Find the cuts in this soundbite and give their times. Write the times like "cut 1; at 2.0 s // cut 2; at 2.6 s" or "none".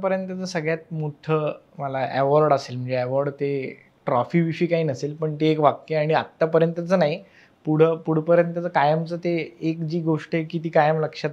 none